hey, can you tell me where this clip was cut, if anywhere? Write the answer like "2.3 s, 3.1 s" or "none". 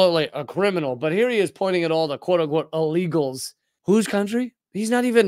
3.7 s